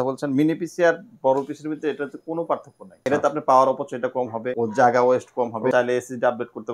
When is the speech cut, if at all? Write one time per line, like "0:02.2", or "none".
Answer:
0:03.0
0:04.4
0:05.7